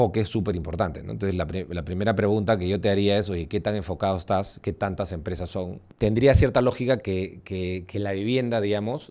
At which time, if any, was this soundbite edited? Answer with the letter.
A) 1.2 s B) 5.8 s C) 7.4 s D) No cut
B